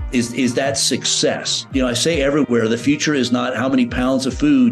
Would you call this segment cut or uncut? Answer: cut